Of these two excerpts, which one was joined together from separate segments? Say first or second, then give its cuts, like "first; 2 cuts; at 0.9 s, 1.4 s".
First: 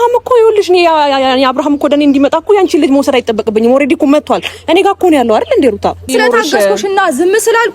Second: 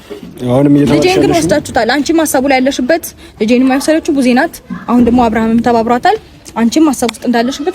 first; 1 cut; at 6.1 s